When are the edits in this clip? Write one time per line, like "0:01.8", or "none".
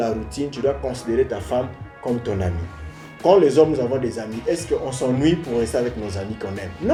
none